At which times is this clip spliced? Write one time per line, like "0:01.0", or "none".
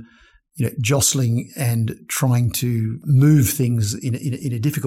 0:03.0

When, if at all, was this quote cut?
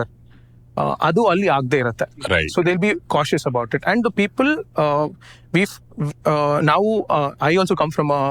none

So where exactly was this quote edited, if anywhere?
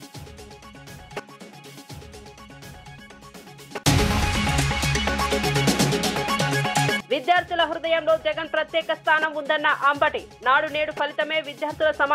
none

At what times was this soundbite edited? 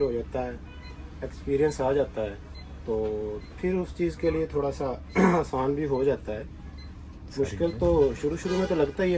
none

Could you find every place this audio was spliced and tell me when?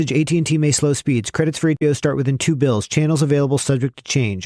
0:01.8

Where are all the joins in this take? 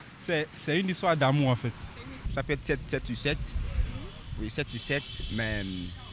0:02.3

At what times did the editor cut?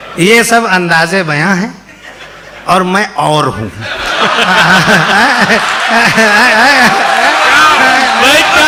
none

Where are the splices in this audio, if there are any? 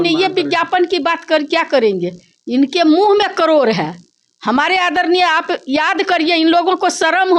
none

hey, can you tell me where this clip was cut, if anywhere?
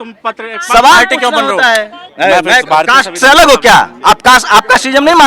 0:02.0

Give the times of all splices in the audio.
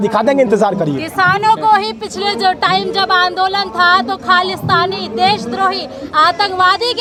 none

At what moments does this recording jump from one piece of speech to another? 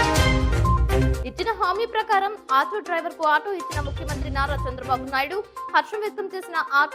0:01.2

